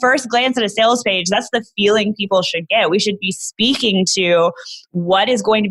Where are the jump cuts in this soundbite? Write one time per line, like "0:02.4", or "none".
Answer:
none